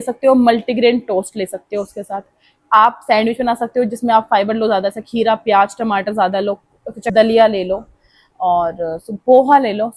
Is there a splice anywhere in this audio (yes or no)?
yes